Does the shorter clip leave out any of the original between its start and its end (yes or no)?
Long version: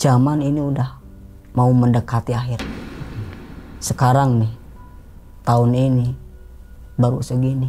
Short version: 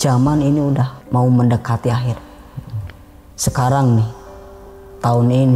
yes